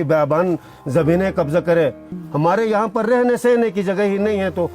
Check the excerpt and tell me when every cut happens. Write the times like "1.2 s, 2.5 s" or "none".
2.1 s

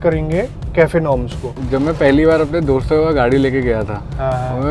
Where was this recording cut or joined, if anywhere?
1.6 s

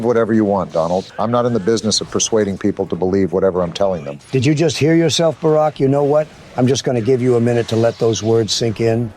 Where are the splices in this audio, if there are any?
1.1 s, 4.1 s

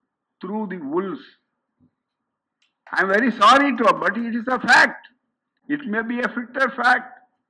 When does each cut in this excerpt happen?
none

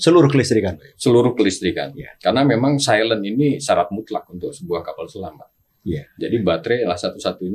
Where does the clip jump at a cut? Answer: none

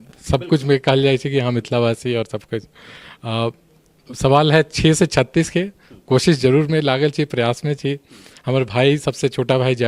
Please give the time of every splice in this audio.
none

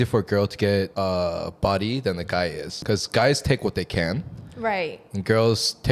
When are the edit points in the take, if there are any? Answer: 0.9 s, 2.7 s

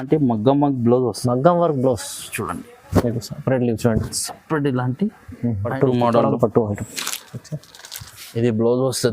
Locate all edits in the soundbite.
5.7 s

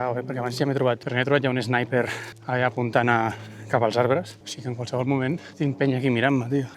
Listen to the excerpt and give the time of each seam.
1.1 s

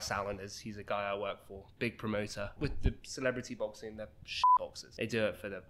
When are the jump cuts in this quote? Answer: 2.5 s, 4.8 s

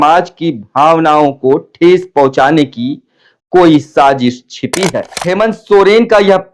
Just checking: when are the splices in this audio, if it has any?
5.1 s

